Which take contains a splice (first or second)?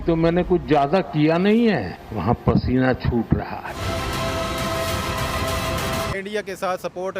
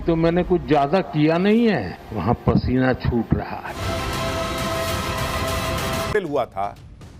first